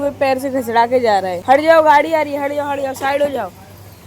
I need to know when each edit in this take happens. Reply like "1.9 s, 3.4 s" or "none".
1.3 s